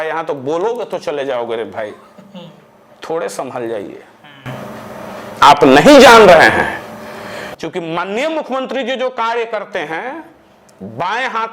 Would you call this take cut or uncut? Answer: uncut